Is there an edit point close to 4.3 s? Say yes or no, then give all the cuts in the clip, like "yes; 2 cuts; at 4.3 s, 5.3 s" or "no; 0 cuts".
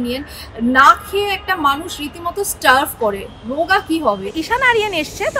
yes; 1 cut; at 4.3 s